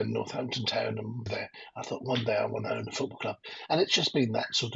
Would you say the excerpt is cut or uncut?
cut